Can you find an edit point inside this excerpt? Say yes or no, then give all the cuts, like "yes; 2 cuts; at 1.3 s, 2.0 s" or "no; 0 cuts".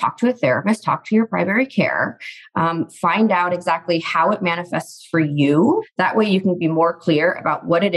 yes; 1 cut; at 5.9 s